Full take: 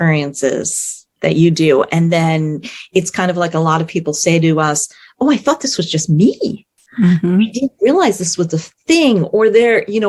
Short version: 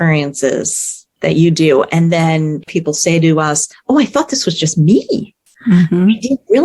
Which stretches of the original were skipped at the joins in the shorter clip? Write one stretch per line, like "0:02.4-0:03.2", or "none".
0:02.7-0:03.9
0:04.9-0:05.0

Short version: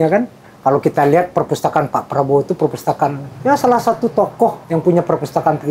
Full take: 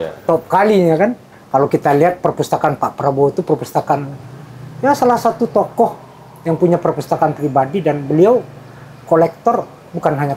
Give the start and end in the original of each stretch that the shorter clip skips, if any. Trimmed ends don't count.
0:04.1-0:04.6
0:06.0-0:06.4

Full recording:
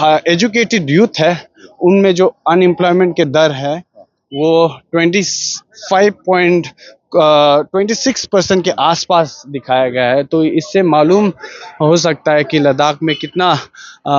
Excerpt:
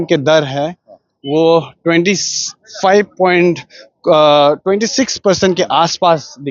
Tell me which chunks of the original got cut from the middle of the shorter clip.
none

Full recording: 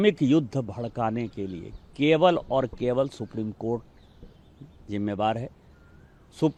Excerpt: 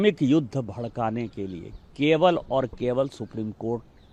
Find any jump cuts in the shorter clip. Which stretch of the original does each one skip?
none

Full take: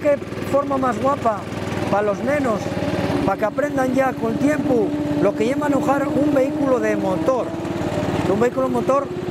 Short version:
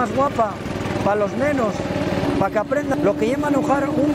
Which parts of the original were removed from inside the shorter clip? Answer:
0:03.8-0:05.1

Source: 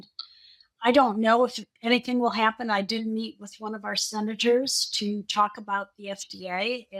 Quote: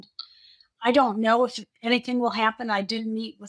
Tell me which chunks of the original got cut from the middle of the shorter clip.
none

